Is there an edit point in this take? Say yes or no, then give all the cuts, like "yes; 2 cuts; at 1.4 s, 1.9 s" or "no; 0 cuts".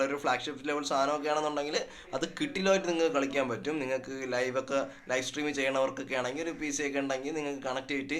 no; 0 cuts